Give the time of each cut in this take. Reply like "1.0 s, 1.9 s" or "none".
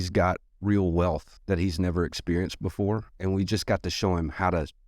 1.3 s, 3.1 s